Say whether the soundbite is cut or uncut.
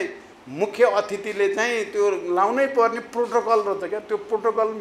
uncut